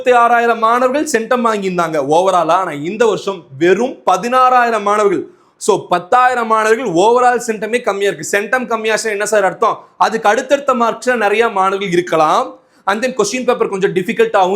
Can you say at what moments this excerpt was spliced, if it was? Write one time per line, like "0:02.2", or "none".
none